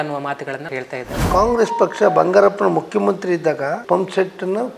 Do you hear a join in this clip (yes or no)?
yes